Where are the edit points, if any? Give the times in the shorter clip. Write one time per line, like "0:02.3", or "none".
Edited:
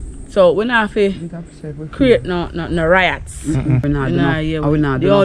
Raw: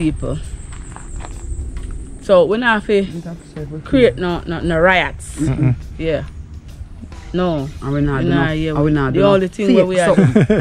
0:03.8